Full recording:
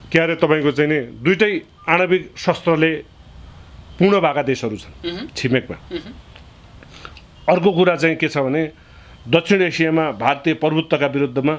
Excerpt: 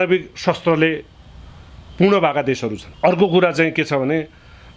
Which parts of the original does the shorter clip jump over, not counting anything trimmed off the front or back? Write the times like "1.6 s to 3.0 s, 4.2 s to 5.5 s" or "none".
4.9 s to 7.3 s